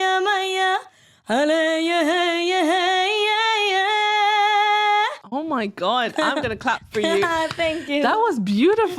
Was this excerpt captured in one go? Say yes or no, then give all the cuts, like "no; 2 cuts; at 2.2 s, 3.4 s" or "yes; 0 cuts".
no; 1 cut; at 5.2 s